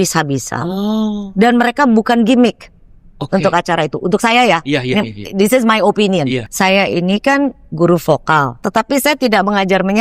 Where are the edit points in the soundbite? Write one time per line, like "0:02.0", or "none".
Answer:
0:06.5
0:08.6